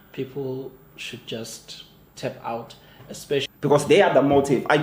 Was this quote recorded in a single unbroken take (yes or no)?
no